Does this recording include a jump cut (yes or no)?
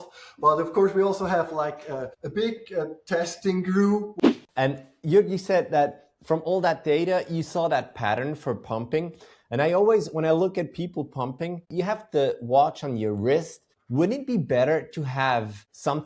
yes